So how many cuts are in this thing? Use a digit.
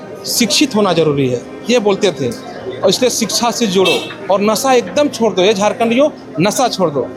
0